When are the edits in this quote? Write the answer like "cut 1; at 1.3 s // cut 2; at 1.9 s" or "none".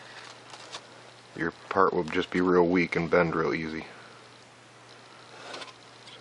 none